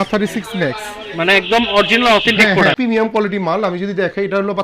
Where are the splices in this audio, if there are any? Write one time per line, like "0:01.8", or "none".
0:02.8